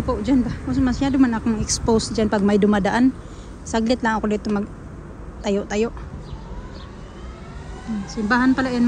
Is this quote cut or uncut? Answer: uncut